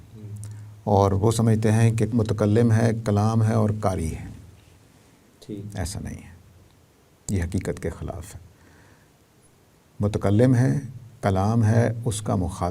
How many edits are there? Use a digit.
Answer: 1